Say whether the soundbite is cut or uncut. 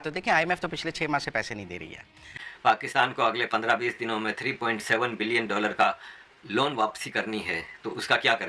cut